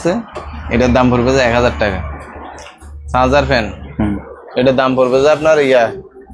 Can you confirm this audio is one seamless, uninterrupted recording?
yes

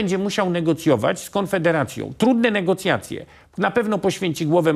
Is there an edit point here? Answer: no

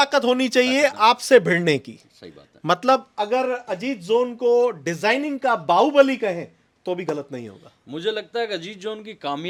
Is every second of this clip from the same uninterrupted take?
yes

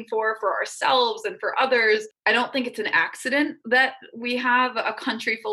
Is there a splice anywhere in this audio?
yes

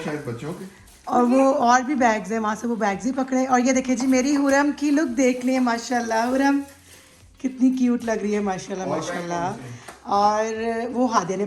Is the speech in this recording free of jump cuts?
yes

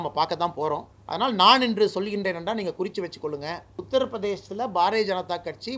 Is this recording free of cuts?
no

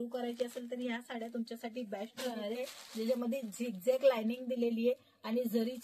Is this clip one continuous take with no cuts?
no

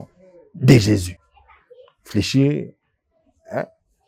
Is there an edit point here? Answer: no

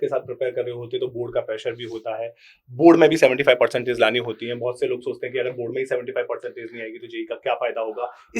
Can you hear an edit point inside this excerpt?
no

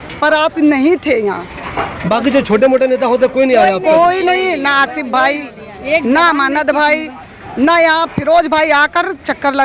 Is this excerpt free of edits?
yes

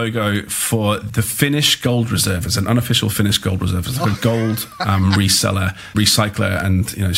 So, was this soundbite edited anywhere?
no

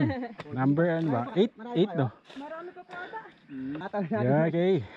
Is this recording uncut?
no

